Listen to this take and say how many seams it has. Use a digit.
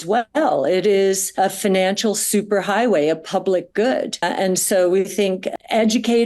1